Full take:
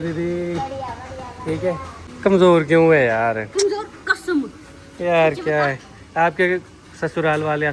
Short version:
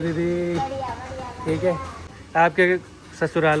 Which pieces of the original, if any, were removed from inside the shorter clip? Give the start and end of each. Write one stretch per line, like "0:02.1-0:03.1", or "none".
0:02.1-0:05.9